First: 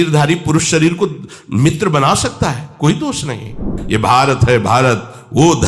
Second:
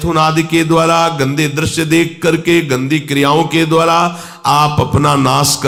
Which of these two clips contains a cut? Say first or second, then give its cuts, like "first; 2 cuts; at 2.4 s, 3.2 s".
first; 1 cut; at 3.7 s